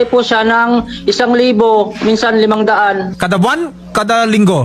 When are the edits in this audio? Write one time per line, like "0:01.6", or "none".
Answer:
none